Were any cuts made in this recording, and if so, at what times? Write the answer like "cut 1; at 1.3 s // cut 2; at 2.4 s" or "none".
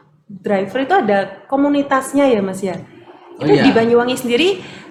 none